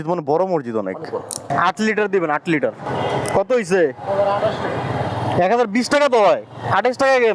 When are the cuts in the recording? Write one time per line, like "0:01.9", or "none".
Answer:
0:01.4
0:02.8